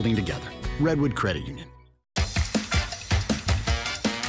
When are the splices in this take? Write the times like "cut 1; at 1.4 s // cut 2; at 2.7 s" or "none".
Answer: cut 1; at 1.9 s